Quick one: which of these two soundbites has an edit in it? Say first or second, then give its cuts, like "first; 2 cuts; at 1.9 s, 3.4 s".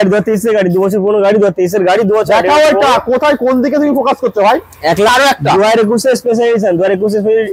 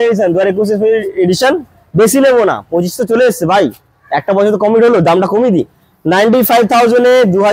first; 1 cut; at 5.1 s